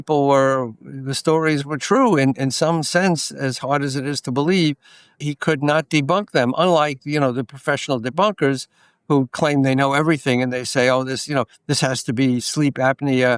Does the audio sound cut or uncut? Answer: cut